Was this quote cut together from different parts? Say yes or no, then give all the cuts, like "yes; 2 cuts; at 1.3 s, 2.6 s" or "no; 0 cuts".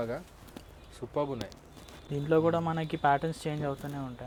no; 0 cuts